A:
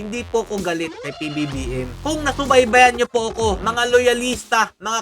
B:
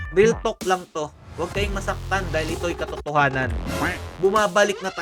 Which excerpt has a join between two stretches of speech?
A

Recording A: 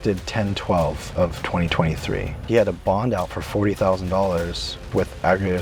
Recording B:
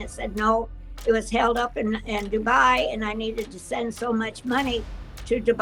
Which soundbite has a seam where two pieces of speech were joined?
A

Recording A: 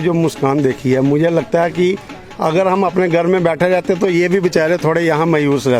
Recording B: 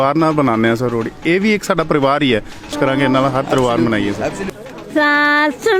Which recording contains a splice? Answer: B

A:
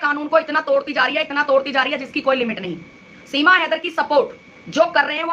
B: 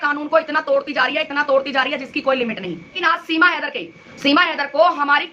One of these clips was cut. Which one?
B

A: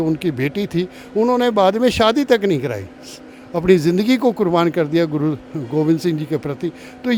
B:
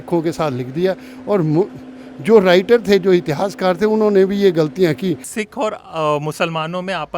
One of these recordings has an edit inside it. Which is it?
B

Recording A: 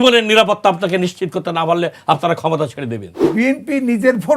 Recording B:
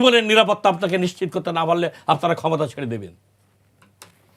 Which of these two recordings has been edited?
A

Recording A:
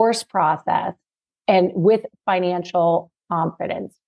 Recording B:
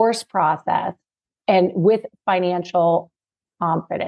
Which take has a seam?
A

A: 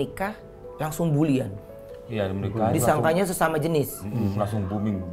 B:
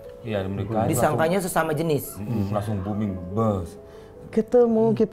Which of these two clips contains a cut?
B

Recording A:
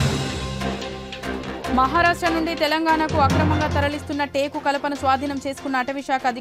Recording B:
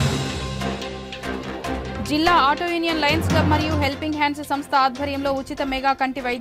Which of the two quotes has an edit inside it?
B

